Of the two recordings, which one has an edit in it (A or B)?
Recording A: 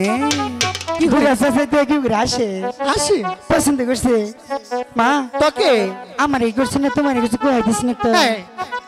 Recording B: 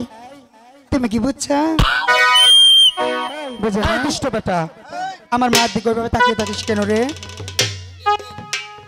B